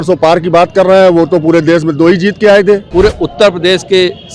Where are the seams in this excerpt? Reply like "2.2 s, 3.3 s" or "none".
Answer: 2.9 s